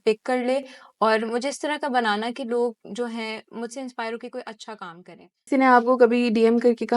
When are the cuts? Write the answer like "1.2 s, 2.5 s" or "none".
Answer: 5.5 s